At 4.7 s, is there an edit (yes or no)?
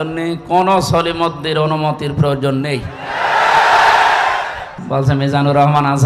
yes